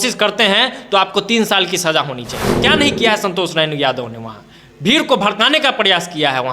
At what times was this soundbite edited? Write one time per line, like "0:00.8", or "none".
0:02.6